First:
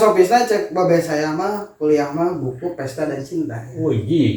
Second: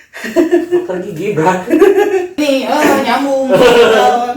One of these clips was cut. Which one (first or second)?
second